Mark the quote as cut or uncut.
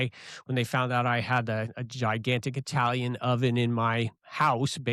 uncut